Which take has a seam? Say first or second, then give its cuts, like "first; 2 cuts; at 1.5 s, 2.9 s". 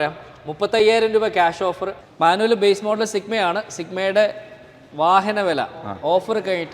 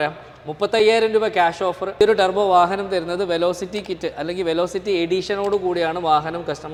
first; 1 cut; at 1.8 s